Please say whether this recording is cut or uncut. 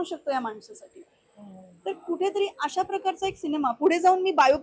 uncut